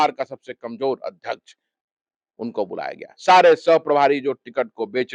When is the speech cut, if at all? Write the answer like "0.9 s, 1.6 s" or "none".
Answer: none